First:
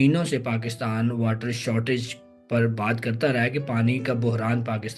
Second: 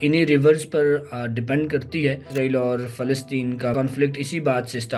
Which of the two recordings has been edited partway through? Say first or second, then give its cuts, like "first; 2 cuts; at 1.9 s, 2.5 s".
second; 2 cuts; at 2.2 s, 3.7 s